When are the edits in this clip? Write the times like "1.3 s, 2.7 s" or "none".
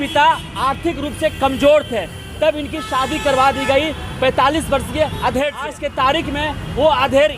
5.8 s